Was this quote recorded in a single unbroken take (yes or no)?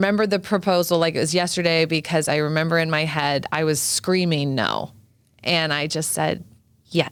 yes